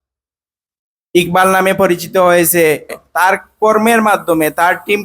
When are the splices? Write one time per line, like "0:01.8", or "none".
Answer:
0:03.0